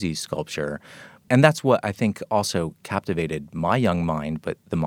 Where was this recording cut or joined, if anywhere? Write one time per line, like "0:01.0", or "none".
0:01.2